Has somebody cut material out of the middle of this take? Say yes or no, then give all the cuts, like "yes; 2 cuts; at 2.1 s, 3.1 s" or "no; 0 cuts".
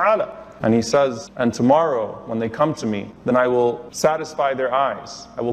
yes; 3 cuts; at 1.2 s, 3.1 s, 3.9 s